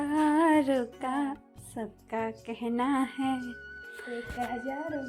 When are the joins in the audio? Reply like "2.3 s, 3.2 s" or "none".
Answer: none